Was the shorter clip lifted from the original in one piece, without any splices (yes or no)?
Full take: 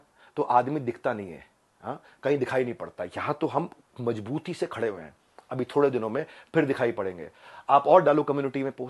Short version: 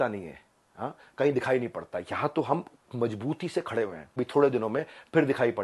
no